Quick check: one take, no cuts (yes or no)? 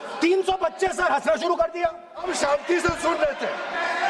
no